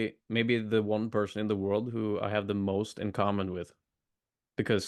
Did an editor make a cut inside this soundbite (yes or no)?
no